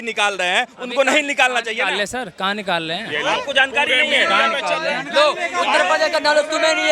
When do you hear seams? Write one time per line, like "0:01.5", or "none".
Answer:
none

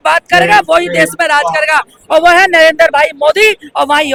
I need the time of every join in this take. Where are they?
none

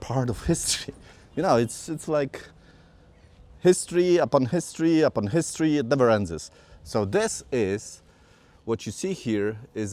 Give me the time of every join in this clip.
none

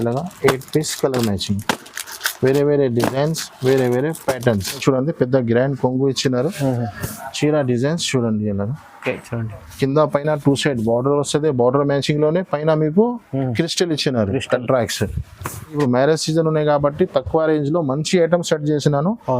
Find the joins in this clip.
0:04.8
0:15.7

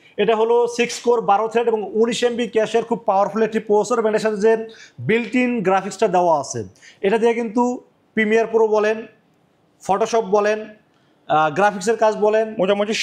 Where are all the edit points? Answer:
none

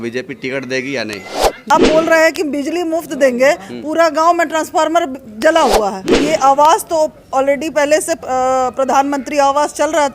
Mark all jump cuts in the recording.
0:01.7
0:06.0

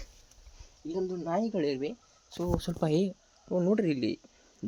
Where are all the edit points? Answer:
none

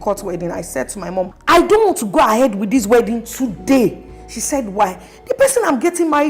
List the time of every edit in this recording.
0:01.4

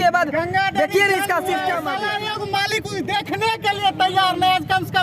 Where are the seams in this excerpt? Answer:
0:01.9

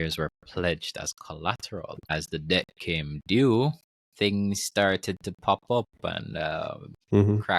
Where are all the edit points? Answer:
0:02.1

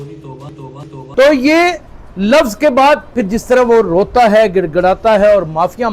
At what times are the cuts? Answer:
none

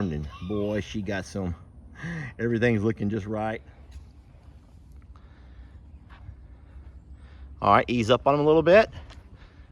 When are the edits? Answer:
0:03.6

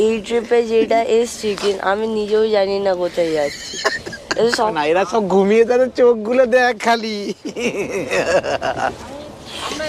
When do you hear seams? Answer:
0:04.7

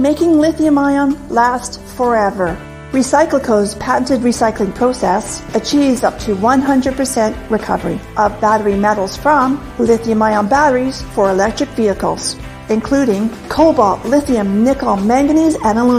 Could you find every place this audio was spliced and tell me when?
0:01.7

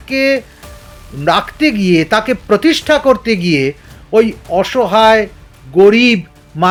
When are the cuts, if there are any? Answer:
none

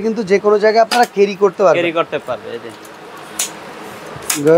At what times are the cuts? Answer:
none

